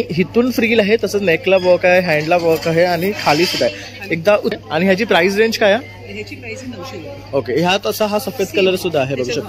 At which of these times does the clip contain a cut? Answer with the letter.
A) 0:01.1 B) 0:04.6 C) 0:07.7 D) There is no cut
B